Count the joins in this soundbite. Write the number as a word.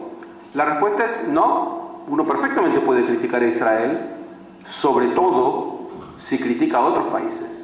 one